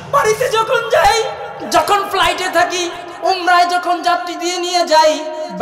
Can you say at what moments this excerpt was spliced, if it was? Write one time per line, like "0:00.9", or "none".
0:01.5
0:03.0